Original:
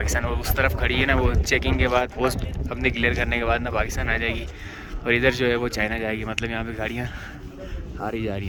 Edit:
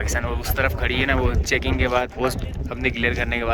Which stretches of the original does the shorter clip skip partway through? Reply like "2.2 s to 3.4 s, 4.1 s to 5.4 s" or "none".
none

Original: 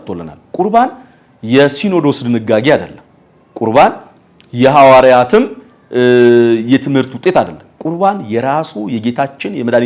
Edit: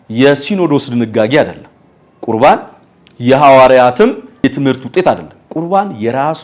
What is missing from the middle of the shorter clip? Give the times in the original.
5.7 s to 6.7 s

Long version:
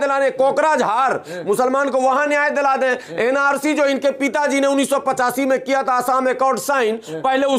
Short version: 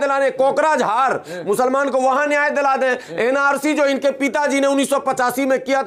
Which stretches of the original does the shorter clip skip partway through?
none

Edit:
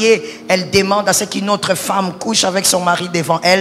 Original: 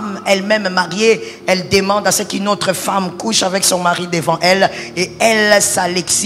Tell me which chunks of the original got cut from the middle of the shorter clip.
none

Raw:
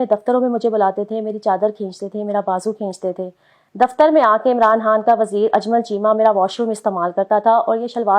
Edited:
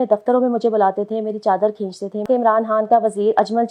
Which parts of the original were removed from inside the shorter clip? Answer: 2.2 s to 4.4 s

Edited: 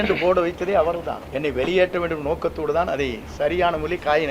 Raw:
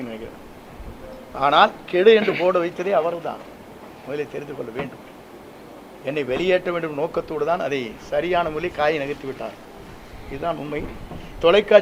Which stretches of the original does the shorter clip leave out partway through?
3.4 s to 5.9 s

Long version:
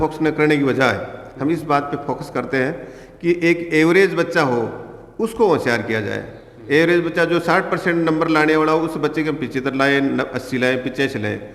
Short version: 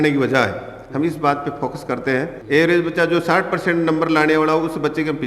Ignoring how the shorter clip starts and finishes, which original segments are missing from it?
2.8 s to 6.5 s

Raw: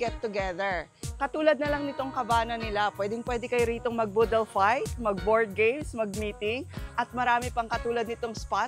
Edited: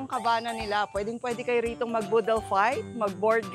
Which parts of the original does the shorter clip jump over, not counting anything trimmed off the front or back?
none

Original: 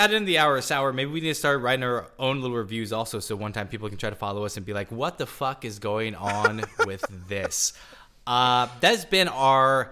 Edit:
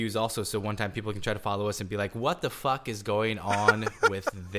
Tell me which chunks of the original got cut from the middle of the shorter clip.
none

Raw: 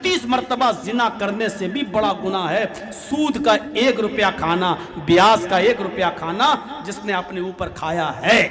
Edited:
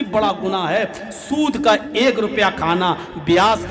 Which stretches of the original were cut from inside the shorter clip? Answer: none

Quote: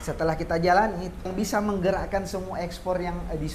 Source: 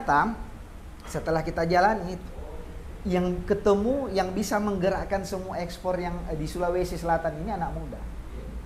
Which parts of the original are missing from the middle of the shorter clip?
2.4 s to 4.3 s

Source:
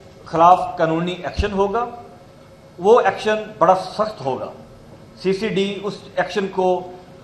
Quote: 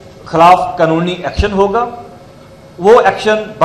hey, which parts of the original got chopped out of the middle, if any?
none

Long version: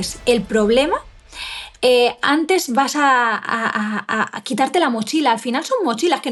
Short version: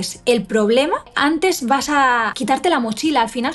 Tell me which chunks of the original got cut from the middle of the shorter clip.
1.1 s to 2.2 s, 3.4 s to 4.4 s

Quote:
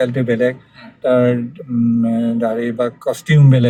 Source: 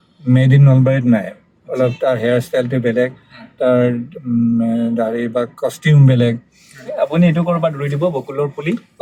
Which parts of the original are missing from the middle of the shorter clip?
none

